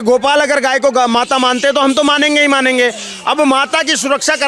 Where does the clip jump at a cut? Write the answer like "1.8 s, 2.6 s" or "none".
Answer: none